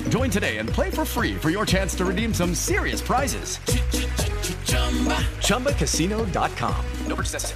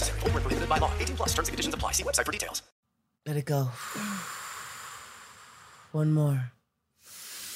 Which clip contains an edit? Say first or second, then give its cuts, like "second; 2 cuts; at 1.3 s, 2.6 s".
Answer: second; 1 cut; at 2.6 s